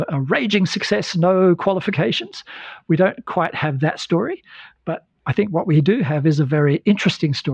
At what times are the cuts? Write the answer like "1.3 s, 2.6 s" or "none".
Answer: none